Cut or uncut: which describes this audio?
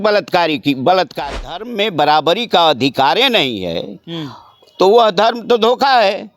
cut